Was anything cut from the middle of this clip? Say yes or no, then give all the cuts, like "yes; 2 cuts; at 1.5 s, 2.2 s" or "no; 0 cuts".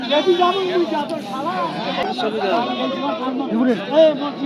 yes; 1 cut; at 2.1 s